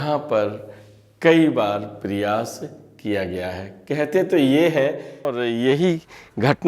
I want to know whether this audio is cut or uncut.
cut